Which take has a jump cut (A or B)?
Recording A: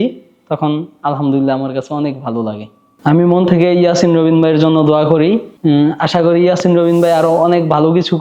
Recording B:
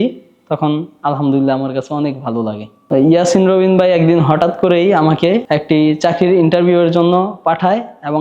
B